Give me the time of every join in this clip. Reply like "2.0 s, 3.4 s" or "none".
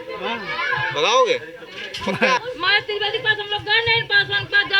2.4 s